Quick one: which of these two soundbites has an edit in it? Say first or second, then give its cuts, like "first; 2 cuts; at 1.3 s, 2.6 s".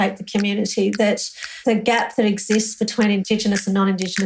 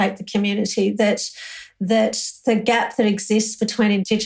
first; 1 cut; at 1.5 s